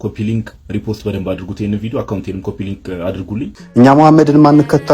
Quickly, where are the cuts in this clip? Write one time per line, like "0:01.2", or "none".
0:03.6